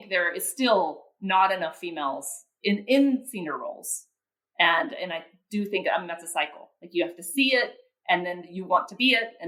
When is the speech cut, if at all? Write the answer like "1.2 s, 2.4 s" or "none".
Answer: none